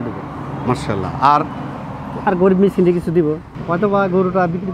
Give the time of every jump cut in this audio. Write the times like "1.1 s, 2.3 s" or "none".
3.5 s